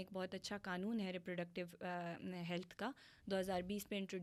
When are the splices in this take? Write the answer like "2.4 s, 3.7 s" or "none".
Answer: none